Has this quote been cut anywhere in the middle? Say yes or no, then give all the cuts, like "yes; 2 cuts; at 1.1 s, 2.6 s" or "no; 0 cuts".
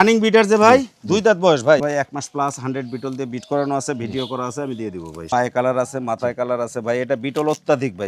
yes; 2 cuts; at 1.8 s, 5.3 s